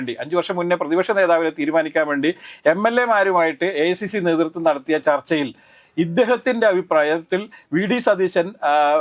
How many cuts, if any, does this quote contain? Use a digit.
0